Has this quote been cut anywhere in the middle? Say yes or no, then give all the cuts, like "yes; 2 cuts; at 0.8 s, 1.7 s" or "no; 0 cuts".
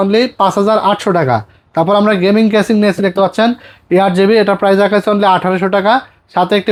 no; 0 cuts